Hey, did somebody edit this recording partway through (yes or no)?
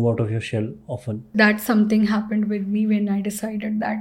yes